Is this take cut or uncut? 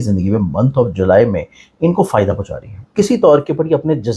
cut